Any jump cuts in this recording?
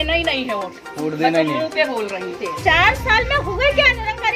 yes; 1 cut; at 2.3 s

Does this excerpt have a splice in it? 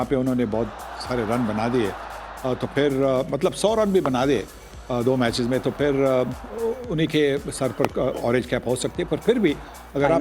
no; 0 cuts

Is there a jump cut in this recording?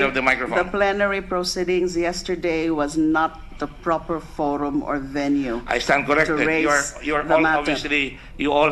no; 0 cuts

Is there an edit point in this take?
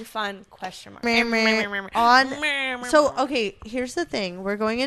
yes; 1 cut; at 1.0 s

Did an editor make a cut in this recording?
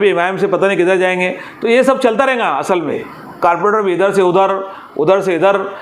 yes; 1 cut; at 3.0 s

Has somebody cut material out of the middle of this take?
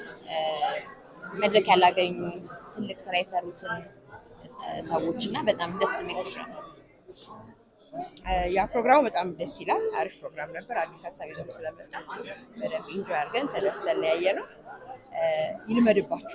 no; 0 cuts

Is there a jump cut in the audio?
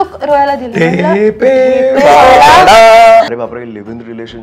yes; 1 cut; at 3.3 s

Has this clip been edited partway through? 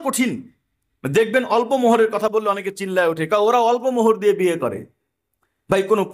no; 0 cuts

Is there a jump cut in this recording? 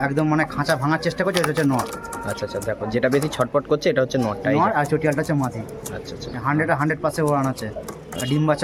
no; 0 cuts

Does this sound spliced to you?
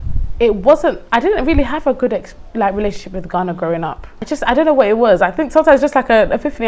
yes; 1 cut; at 4.2 s

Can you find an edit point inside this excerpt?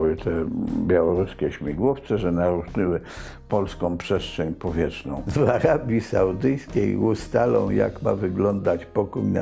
yes; 1 cut; at 5.2 s

